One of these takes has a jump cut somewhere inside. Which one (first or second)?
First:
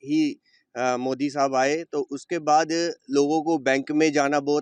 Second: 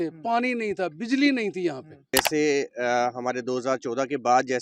second